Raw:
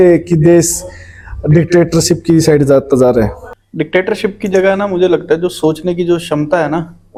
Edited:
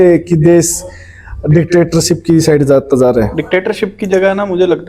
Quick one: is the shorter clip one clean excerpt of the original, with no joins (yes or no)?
no